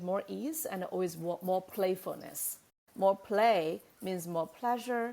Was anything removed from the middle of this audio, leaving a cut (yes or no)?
yes